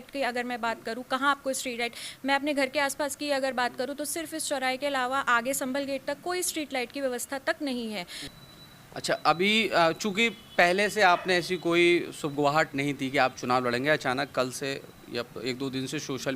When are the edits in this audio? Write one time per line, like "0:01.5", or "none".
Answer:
0:08.2